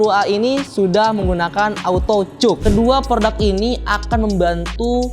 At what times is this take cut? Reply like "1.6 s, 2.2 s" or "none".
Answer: 2.6 s